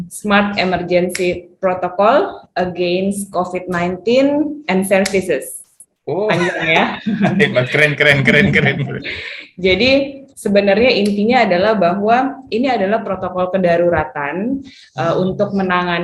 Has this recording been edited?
no; 0 cuts

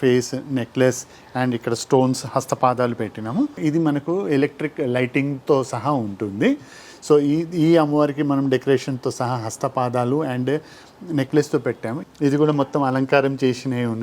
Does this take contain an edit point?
yes; 2 cuts; at 3.6 s, 11.9 s

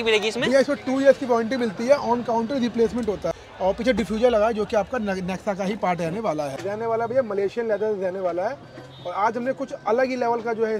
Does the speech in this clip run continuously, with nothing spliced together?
no; 2 cuts; at 3.3 s, 6.5 s

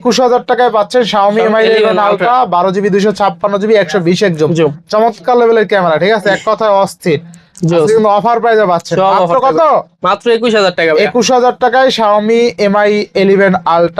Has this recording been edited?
no; 0 cuts

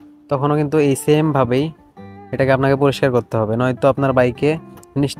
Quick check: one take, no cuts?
yes; 0 cuts

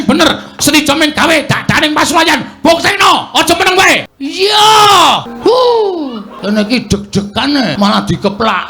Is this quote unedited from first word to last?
no; 4 cuts; at 4.2 s, 5.3 s, 6.3 s, 7.7 s

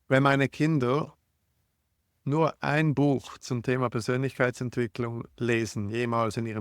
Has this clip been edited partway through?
no; 0 cuts

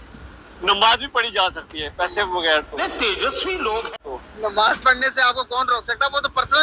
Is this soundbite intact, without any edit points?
no; 2 cuts; at 2.7 s, 4.0 s

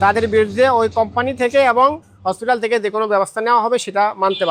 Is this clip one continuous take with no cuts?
yes; 0 cuts

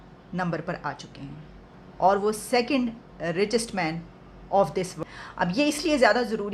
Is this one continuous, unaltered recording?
no; 1 cut; at 5.0 s

